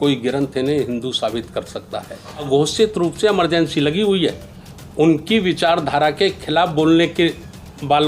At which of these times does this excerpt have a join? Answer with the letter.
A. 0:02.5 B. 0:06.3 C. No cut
A